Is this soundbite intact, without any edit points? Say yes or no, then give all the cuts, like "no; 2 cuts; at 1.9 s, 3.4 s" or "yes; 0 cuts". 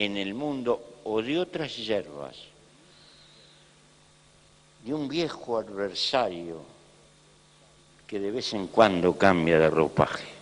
no; 1 cut; at 4.0 s